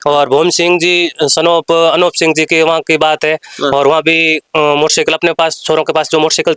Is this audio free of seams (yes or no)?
yes